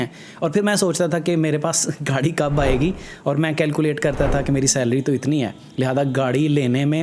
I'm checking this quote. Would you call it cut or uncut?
uncut